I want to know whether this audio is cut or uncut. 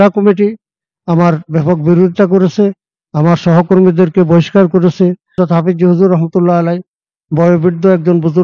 cut